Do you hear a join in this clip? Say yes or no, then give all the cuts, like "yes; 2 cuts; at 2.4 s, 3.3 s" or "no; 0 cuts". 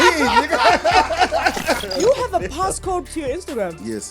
yes; 2 cuts; at 1.9 s, 3.1 s